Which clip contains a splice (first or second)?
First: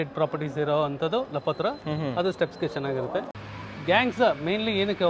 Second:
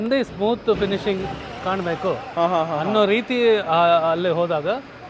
first